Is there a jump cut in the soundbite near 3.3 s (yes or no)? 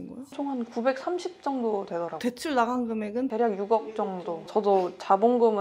yes